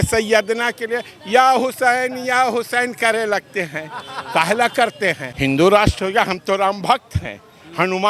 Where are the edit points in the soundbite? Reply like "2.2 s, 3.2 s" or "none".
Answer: 5.3 s